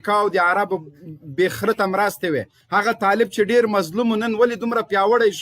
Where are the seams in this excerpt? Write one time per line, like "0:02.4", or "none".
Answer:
0:02.6